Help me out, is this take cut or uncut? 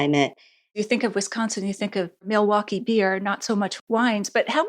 cut